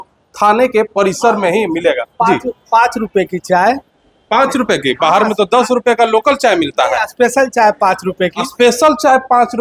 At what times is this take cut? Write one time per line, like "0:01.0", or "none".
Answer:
none